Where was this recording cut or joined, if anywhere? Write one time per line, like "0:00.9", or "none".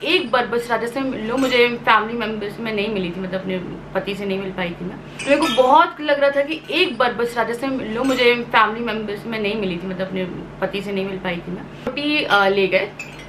none